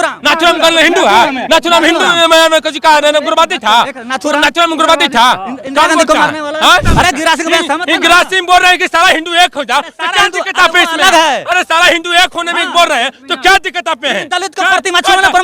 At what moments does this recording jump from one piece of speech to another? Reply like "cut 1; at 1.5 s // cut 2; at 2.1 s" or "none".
cut 1; at 6.9 s